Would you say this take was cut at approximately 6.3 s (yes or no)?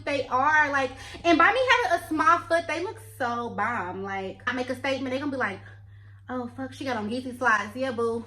no